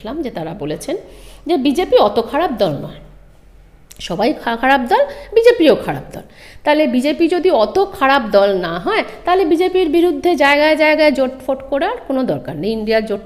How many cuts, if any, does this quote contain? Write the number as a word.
zero